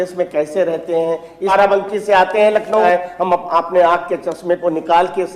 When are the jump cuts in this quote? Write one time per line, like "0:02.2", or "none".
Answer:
0:01.5
0:02.8